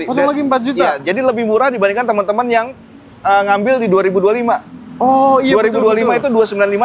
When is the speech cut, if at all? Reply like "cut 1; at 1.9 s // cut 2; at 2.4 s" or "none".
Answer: none